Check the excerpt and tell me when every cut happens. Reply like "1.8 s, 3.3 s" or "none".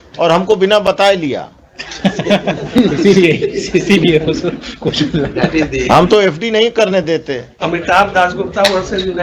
none